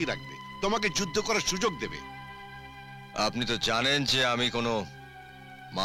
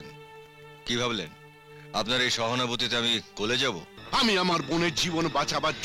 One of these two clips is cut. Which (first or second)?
second